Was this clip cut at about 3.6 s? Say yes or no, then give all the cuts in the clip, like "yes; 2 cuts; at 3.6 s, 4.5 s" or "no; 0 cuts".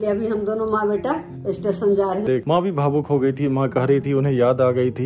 no; 1 cut; at 2.2 s